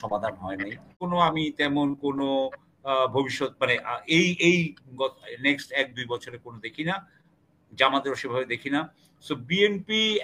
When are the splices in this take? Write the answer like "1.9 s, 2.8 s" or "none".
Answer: 1.0 s